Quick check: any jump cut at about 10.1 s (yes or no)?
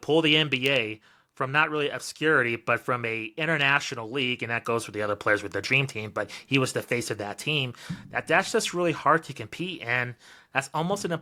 no